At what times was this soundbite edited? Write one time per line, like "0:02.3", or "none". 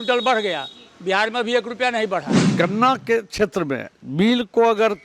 0:02.4

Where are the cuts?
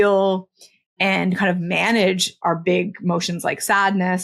0:02.4

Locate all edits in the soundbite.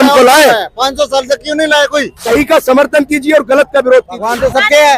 0:02.1
0:04.2

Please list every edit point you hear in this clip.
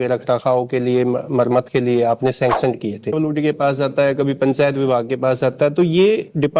0:03.2

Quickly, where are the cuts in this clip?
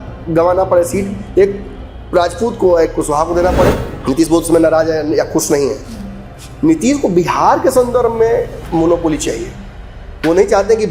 0:03.9

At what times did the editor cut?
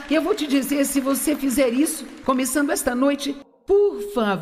0:03.5

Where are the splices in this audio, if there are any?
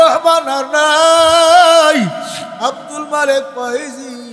none

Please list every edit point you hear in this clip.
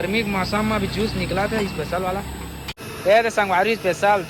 none

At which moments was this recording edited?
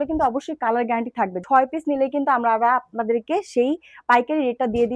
0:01.4

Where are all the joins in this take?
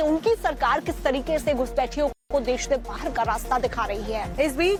none

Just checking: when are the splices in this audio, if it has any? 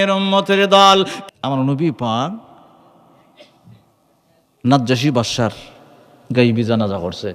0:01.2

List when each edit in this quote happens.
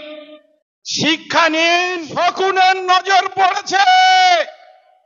0:02.0

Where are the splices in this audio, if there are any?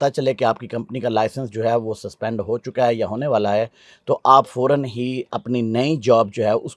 none

